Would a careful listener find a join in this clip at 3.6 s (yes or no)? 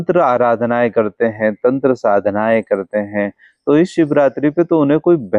no